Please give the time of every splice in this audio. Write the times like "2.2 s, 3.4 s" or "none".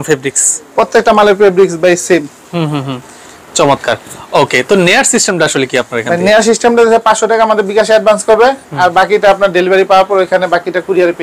none